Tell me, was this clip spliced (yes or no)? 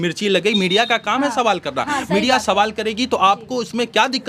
no